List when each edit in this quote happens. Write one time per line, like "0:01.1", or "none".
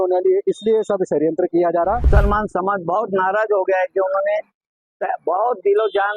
0:02.0